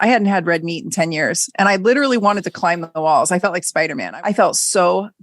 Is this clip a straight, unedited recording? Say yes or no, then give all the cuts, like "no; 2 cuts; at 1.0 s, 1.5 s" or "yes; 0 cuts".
no; 1 cut; at 4.0 s